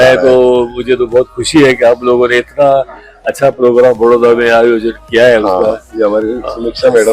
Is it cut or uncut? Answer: uncut